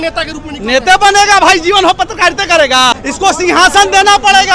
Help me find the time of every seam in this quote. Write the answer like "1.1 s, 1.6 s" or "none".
2.9 s